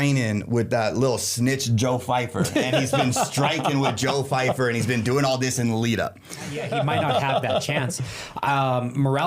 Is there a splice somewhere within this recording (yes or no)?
yes